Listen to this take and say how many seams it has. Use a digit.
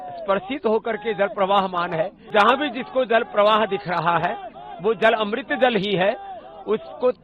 1